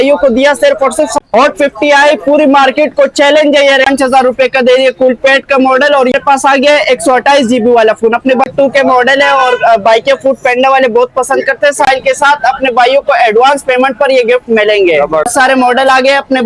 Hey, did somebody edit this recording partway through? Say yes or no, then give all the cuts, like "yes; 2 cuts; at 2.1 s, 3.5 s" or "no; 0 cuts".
yes; 6 cuts; at 1.2 s, 3.9 s, 6.1 s, 8.5 s, 11.9 s, 15.3 s